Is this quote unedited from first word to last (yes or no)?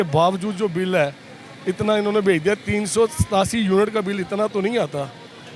yes